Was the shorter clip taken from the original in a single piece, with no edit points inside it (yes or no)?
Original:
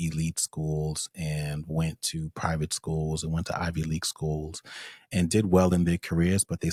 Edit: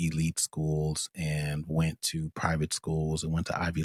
yes